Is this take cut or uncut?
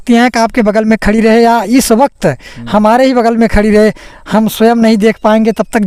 uncut